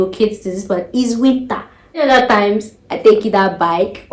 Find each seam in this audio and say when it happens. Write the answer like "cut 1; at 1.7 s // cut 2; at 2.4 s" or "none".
cut 1; at 2.0 s